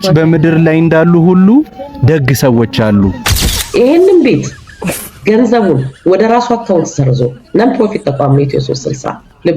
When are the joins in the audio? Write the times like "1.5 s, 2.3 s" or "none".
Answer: 3.3 s